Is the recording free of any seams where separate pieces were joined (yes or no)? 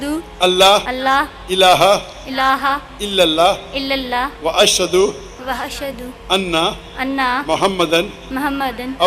no